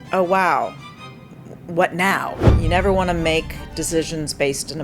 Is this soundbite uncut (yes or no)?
no